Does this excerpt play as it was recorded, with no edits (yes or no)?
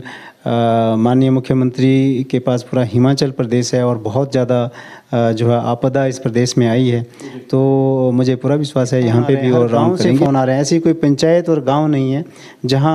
no